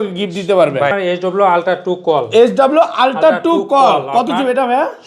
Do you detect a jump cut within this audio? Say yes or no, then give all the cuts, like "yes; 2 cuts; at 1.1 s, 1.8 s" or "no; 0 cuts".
yes; 1 cut; at 0.9 s